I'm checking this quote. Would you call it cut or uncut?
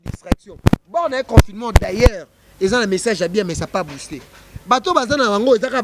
uncut